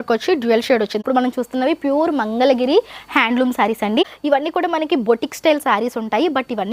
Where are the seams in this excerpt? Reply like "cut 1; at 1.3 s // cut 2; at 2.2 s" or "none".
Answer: cut 1; at 1.0 s // cut 2; at 4.0 s